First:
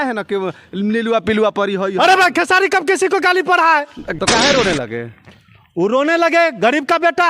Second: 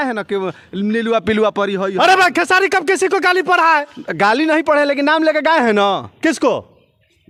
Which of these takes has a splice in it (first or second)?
first